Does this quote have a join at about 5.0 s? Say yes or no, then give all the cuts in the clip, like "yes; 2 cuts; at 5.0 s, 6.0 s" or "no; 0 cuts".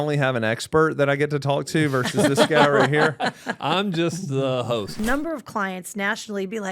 yes; 1 cut; at 5.0 s